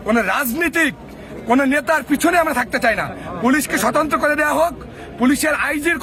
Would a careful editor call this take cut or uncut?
uncut